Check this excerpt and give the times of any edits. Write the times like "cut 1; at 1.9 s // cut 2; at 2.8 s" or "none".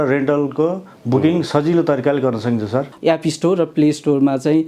cut 1; at 2.9 s